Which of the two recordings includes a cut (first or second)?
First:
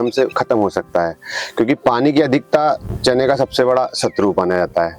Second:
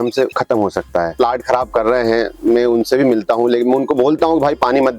second